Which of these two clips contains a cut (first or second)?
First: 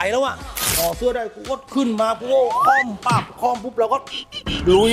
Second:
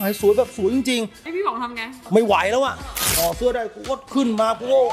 second